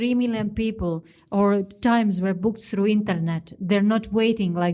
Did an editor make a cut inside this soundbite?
no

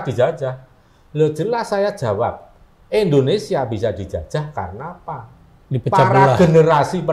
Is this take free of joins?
yes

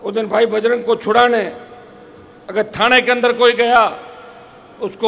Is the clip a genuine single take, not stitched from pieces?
yes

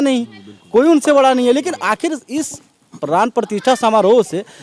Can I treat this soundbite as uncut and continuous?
yes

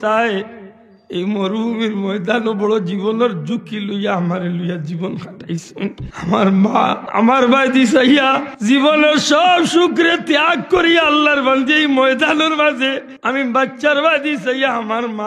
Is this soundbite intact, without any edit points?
no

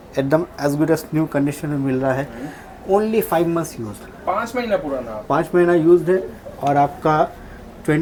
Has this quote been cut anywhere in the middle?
no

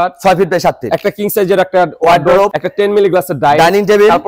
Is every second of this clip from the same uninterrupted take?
no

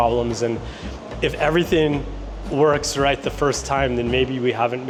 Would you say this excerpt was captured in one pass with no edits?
yes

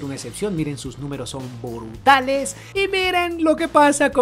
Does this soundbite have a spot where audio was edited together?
yes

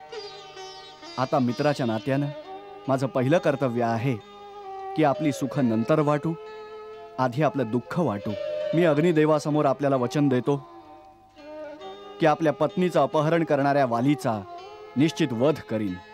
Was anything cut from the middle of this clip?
yes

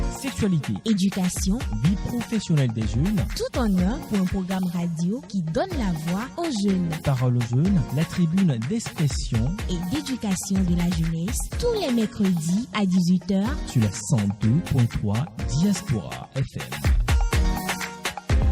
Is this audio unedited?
yes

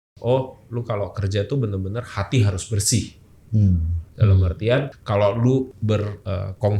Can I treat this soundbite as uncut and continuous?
no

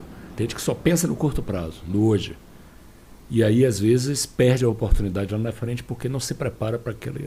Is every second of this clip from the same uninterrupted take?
yes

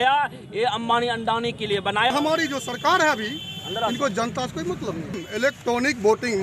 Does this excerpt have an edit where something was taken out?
yes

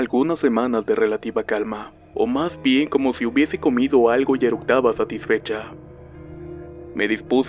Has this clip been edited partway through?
no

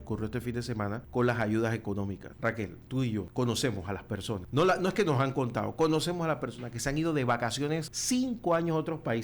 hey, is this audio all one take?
no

